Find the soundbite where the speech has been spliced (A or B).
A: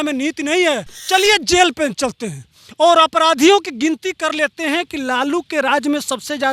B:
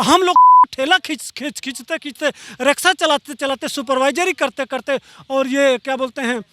A